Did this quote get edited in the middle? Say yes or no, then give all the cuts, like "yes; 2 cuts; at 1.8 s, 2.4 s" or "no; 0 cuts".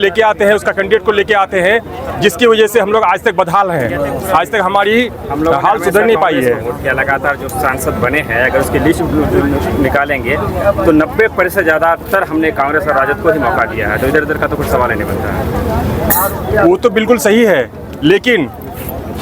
no; 0 cuts